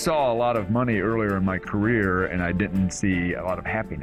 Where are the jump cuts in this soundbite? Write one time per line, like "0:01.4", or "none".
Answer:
none